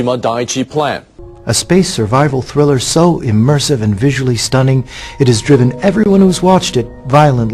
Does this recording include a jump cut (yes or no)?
yes